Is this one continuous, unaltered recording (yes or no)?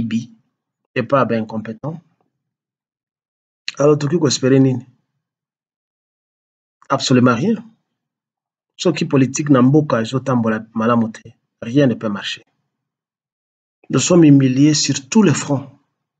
no